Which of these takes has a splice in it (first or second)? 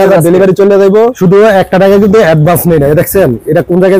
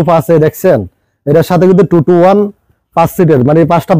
first